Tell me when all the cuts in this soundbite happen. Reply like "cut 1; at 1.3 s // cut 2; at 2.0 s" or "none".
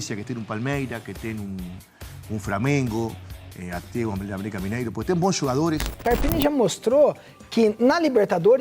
cut 1; at 6.0 s